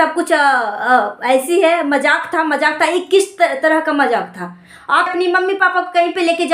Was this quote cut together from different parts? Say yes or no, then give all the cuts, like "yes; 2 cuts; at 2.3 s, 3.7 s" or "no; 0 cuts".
yes; 1 cut; at 5.1 s